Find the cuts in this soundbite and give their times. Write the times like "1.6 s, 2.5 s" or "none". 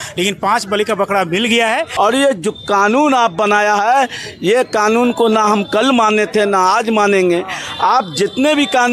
1.9 s